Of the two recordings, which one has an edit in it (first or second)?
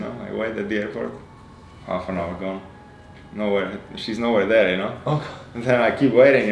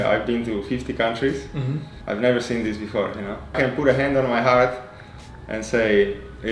second